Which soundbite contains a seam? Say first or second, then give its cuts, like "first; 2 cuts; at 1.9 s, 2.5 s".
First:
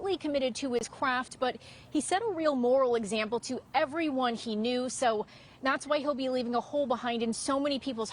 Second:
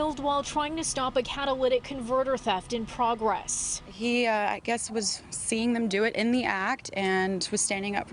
first; 1 cut; at 4.3 s